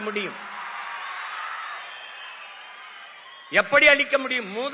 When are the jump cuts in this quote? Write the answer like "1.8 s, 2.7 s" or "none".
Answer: none